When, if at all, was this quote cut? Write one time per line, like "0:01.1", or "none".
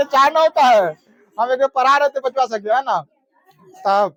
none